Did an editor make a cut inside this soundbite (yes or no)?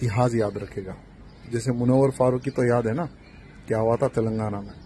no